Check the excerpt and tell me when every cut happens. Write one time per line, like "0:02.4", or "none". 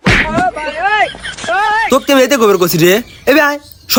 none